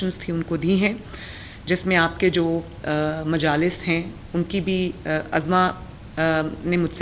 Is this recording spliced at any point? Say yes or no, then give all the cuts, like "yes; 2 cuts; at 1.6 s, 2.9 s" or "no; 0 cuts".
no; 0 cuts